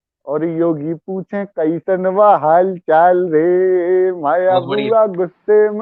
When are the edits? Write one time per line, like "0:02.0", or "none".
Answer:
none